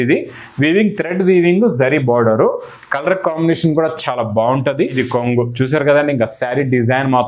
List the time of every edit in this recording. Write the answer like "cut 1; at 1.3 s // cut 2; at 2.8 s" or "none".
cut 1; at 5.0 s